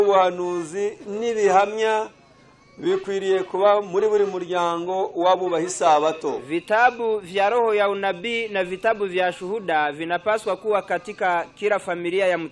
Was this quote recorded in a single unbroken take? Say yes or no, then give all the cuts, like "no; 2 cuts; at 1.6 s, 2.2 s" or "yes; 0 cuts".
yes; 0 cuts